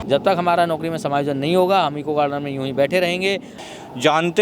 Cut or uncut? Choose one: cut